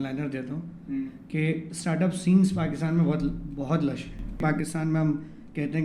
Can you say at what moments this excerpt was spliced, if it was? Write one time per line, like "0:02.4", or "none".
0:04.4